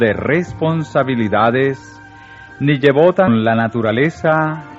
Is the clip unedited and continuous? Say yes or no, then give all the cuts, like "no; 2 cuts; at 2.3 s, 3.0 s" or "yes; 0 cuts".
yes; 0 cuts